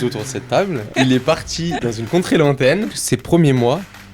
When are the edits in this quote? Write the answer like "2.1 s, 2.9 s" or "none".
0.9 s, 1.8 s, 2.9 s